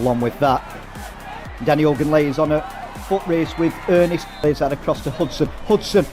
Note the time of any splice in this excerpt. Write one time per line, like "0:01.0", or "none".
0:04.3